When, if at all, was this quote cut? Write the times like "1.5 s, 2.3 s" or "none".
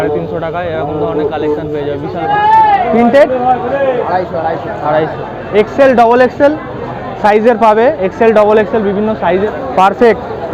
2.3 s, 9.5 s